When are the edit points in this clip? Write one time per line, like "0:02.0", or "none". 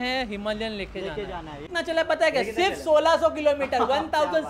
0:01.6